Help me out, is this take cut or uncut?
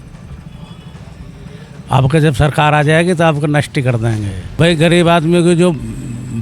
cut